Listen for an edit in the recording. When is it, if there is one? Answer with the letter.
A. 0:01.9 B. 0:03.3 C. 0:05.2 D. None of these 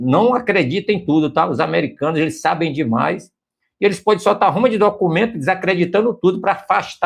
D